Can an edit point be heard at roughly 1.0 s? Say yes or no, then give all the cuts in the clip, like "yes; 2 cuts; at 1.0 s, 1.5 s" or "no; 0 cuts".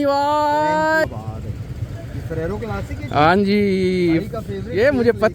yes; 1 cut; at 1.0 s